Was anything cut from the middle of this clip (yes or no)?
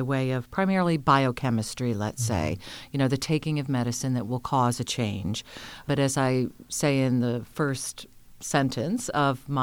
yes